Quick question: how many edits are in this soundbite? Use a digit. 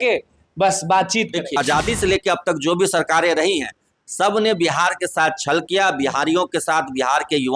1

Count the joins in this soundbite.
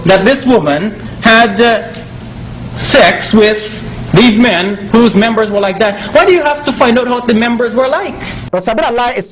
1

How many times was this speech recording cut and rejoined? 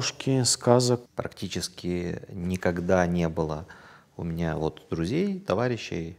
1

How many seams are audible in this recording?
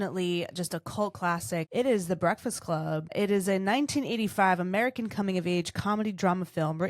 2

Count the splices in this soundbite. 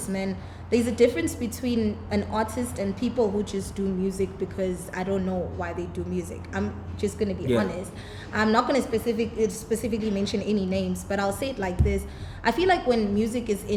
0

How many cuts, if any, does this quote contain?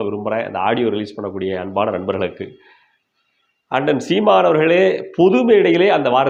0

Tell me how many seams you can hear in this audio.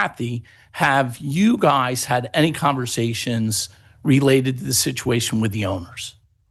0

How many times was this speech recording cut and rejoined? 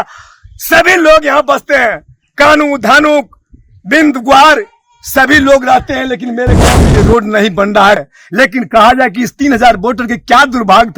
1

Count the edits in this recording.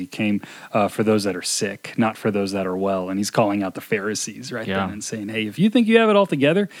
0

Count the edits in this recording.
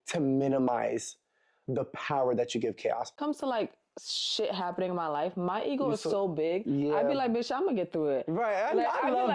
1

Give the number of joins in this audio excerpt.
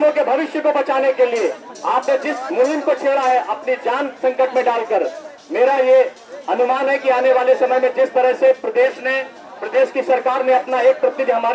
0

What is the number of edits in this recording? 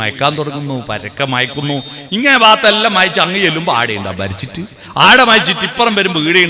0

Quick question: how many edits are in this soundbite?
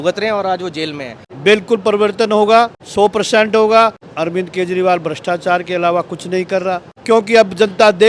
4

